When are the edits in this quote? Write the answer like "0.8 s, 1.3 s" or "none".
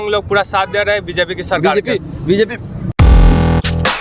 2.9 s